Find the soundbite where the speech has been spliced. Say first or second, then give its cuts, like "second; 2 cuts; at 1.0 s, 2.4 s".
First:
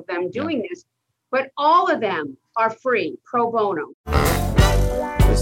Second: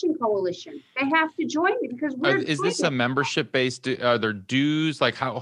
first; 1 cut; at 3.9 s